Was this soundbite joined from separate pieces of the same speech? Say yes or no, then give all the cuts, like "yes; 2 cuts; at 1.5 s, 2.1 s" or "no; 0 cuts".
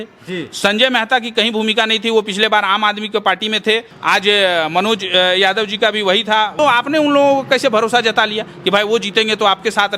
yes; 2 cuts; at 3.9 s, 6.6 s